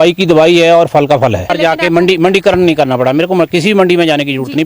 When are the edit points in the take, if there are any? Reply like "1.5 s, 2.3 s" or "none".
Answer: 1.5 s

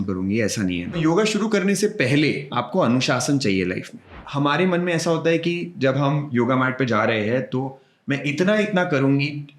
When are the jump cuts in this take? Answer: 1.0 s, 2.5 s, 4.2 s, 6.2 s

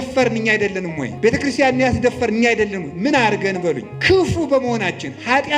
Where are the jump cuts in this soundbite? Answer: 1.0 s, 3.9 s

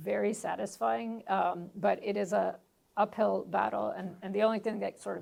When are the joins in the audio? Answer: none

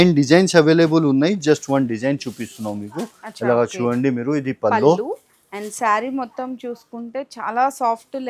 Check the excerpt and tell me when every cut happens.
none

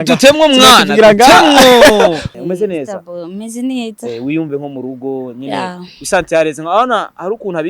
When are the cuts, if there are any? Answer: 2.3 s

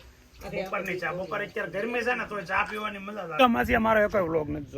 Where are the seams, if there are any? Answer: 3.4 s

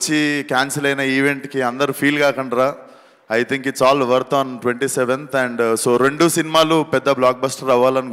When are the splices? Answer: none

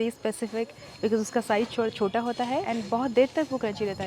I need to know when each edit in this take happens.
2.6 s

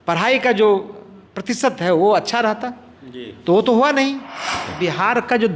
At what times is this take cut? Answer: 4.6 s

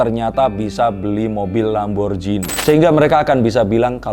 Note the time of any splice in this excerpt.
2.5 s

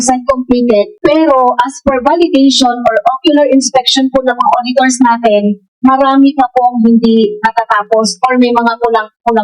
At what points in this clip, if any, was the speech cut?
0.9 s

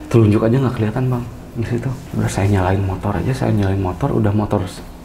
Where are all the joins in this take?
none

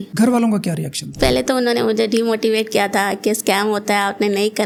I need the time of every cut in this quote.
none

